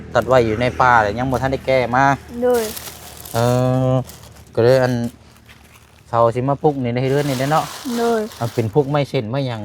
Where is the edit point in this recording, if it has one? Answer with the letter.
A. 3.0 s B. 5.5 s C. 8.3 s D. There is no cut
C